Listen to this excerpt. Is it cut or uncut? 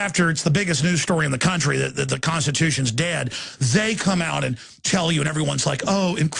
cut